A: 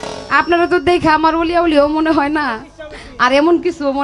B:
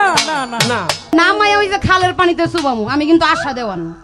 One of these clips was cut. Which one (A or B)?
B